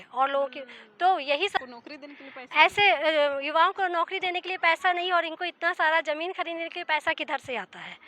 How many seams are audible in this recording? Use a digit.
1